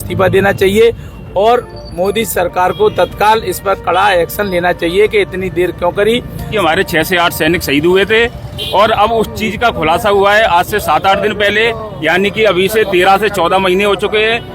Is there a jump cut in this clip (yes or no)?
yes